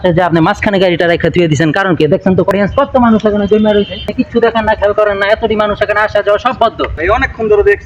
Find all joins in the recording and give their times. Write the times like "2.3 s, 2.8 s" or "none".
2.5 s, 4.1 s, 6.9 s